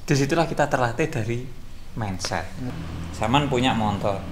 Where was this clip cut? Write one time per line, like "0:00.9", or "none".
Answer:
0:02.6